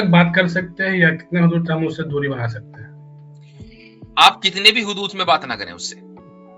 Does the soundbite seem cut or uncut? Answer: uncut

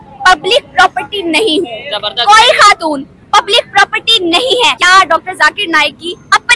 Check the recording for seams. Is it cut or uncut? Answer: uncut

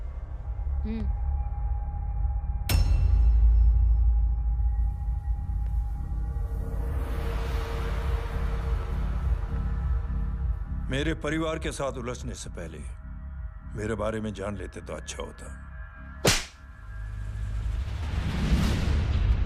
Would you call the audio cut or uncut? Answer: uncut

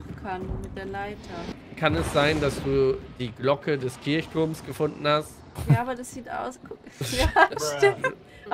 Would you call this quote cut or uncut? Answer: cut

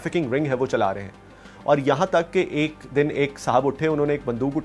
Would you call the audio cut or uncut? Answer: uncut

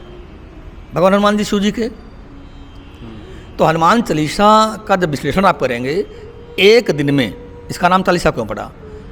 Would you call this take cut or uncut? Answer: uncut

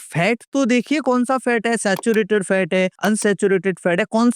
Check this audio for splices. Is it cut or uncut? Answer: uncut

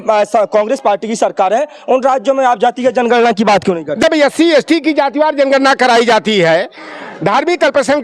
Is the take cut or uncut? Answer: cut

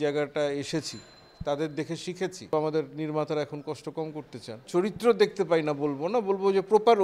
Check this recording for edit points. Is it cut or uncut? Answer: cut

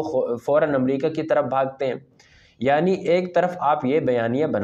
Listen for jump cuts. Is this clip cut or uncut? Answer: uncut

